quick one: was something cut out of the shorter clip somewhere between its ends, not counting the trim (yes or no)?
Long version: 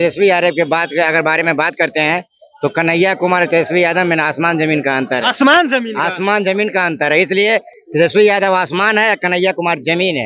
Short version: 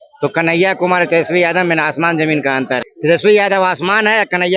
yes